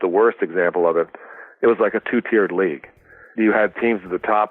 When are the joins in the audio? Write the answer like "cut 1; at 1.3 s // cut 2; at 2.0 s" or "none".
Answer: cut 1; at 3.3 s

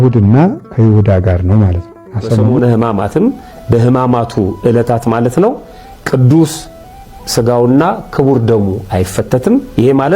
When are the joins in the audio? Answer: cut 1; at 2.5 s

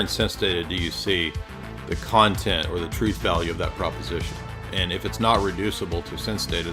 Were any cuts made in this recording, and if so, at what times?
none

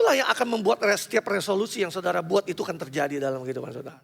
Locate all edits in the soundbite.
none

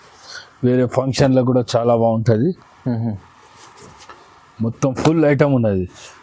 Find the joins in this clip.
none

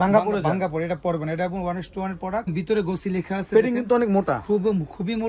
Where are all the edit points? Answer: none

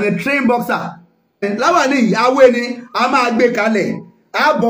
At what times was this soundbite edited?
cut 1; at 1.4 s

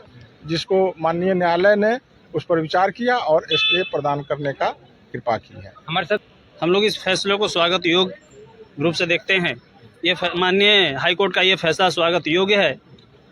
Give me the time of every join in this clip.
cut 1; at 6.2 s

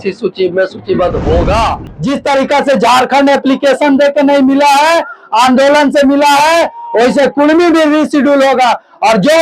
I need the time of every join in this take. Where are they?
cut 1; at 1.9 s

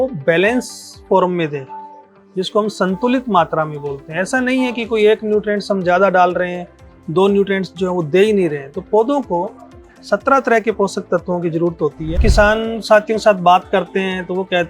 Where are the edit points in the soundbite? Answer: cut 1; at 12.2 s

